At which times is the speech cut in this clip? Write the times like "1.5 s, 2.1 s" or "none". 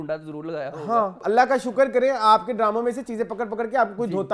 1.2 s